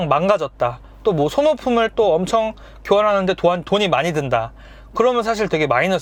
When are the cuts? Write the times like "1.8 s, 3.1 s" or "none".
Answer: none